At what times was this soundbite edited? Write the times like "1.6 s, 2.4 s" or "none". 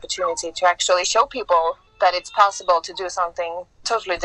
none